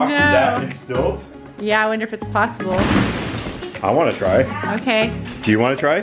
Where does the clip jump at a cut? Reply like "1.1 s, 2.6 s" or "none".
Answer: 3.6 s